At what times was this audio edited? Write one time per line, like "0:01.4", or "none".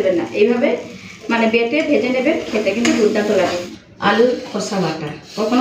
0:03.6